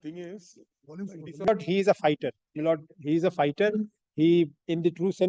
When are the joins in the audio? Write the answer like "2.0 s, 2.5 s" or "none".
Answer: 1.5 s